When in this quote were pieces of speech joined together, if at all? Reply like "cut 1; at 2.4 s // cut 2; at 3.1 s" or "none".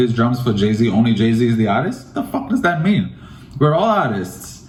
none